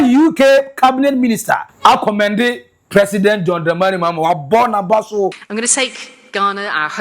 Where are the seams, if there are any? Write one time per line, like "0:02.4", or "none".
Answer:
0:01.7
0:05.4